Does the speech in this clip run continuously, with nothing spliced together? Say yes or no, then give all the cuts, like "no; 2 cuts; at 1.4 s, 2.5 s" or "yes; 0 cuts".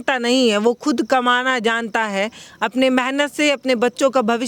yes; 0 cuts